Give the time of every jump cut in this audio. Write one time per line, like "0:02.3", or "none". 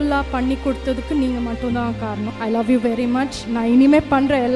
0:02.3
0:03.4

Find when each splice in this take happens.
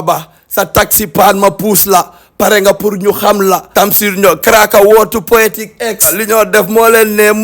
0:03.8
0:06.1

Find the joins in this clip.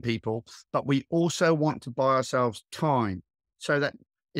none

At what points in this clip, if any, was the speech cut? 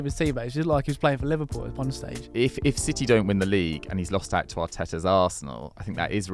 0:02.2

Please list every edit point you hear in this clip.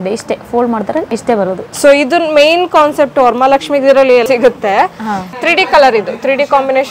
0:01.6
0:04.2

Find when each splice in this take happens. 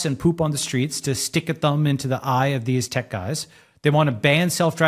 none

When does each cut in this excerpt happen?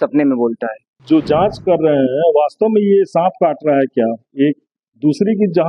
0:00.9

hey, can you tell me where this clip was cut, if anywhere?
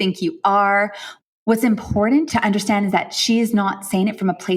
0:01.0
0:02.3

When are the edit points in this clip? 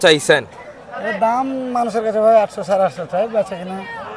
none

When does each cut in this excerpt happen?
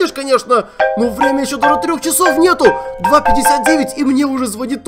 none

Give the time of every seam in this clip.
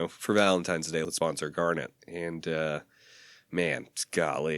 0:01.0

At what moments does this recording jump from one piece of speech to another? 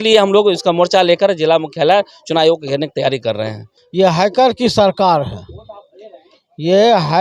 none

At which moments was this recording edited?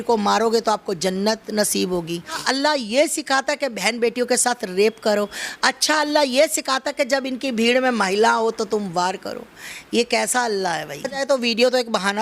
0:02.4
0:11.2

